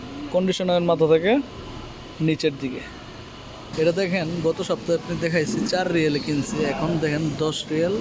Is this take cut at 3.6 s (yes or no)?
yes